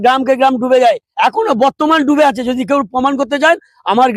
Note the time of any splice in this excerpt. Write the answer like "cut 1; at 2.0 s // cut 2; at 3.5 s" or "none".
none